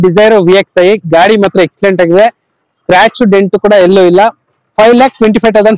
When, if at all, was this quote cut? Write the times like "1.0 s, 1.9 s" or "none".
none